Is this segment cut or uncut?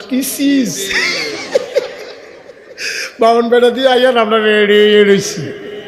uncut